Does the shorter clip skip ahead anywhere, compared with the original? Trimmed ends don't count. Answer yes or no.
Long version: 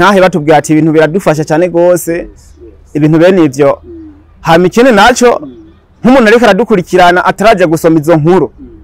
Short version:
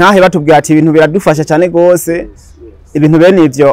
no